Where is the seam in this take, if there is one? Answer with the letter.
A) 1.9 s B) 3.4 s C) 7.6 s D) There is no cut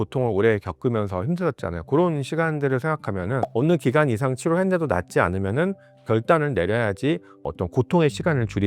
B